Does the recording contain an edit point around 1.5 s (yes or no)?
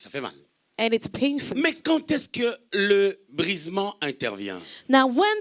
yes